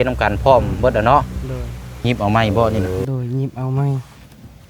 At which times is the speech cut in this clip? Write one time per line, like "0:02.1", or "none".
0:02.0